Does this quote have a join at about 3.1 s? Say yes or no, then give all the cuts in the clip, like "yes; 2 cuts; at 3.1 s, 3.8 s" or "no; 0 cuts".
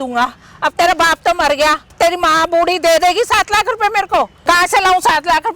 no; 2 cuts; at 1.9 s, 4.4 s